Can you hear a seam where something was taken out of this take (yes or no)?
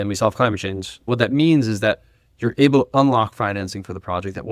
yes